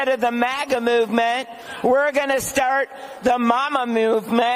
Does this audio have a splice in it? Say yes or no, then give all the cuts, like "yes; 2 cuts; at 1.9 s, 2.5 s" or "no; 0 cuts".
no; 0 cuts